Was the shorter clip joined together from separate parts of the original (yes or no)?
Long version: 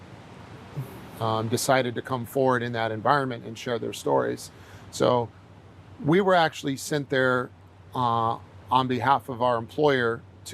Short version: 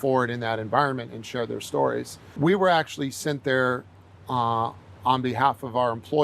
yes